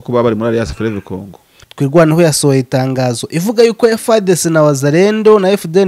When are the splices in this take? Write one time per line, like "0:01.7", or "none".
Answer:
0:01.4